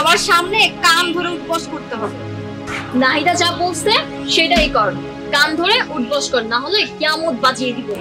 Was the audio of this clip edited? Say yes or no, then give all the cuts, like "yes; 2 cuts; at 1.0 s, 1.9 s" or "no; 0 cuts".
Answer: yes; 1 cut; at 2.7 s